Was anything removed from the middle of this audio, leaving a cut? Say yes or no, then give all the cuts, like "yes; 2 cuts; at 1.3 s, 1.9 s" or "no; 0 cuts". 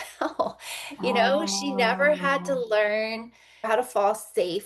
yes; 1 cut; at 3.7 s